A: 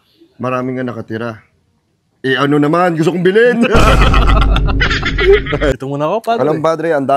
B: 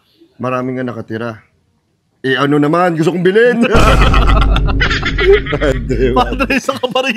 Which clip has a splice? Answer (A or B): A